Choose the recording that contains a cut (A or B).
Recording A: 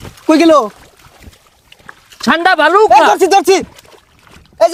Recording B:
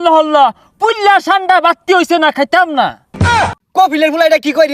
B